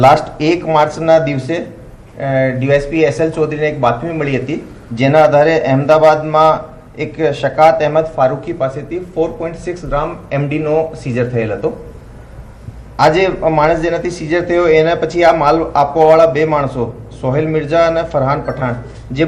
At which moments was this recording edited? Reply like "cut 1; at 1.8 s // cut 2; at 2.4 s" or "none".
none